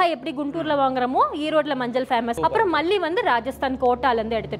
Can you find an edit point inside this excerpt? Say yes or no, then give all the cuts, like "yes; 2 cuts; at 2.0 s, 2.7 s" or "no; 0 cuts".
yes; 1 cut; at 2.3 s